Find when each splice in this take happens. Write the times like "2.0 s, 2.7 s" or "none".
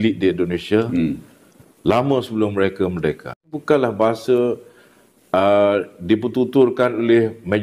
3.4 s